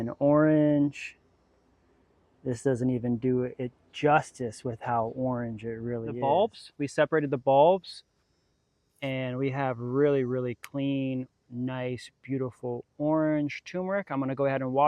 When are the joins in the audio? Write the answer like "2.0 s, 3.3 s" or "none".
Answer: 6.1 s